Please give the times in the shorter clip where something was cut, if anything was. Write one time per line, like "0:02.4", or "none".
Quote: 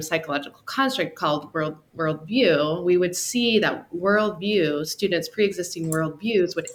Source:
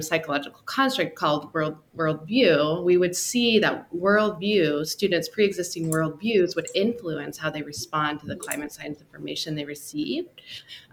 none